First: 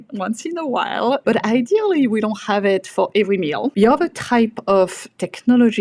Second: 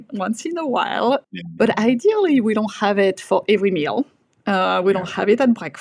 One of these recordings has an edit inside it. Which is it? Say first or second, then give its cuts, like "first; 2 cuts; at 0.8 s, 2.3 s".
first; 2 cuts; at 1.2 s, 3.7 s